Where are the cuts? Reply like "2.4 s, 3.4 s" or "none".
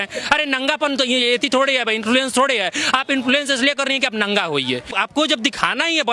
4.9 s